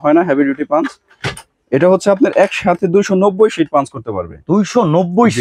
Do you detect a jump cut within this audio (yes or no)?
no